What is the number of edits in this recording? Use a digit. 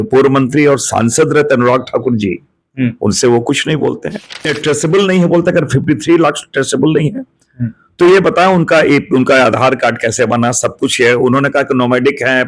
1